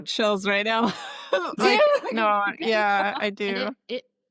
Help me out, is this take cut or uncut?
uncut